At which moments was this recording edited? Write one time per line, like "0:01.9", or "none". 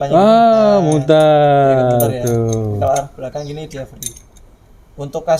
none

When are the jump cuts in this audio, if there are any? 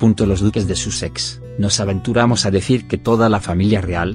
0:01.1

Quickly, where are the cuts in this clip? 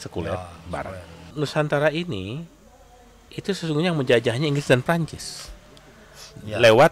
0:01.2

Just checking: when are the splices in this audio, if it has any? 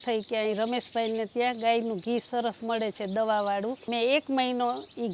0:03.8

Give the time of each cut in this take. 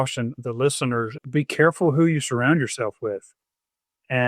0:01.2

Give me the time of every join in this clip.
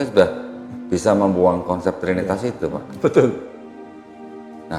none

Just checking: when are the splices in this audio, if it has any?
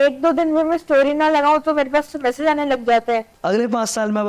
0:03.3

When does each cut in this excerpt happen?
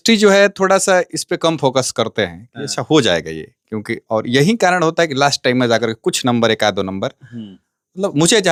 none

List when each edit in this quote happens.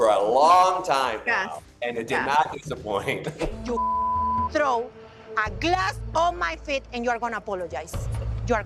0:03.5

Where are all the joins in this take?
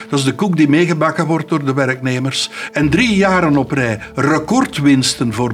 none

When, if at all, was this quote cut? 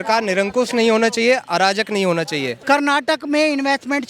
0:02.5

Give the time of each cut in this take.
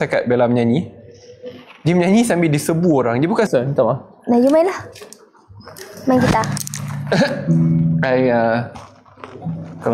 0:03.5

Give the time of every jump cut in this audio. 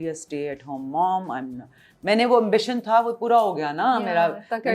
none

